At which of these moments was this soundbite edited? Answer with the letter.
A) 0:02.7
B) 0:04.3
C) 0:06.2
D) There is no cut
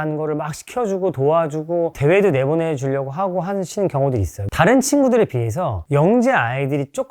B